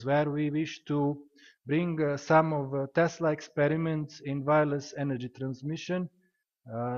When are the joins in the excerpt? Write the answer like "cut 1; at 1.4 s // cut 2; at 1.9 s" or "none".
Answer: cut 1; at 3.4 s